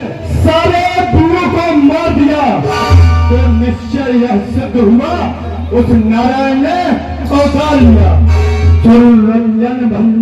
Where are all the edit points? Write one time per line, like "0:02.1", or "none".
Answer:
0:08.7